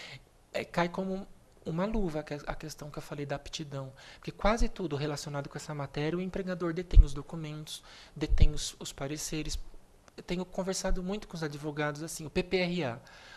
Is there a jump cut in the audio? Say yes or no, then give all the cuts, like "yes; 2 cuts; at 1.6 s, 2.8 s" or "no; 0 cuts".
yes; 1 cut; at 11.2 s